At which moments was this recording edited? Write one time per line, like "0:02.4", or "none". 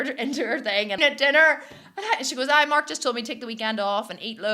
0:01.0